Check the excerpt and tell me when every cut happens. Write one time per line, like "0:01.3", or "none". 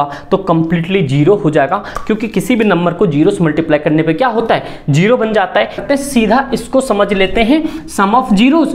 0:05.8